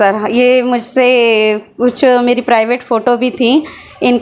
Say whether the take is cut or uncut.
uncut